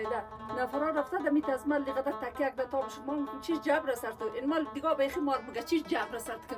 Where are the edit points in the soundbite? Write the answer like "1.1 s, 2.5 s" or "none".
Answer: none